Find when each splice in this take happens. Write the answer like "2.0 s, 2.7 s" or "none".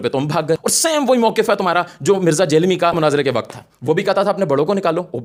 none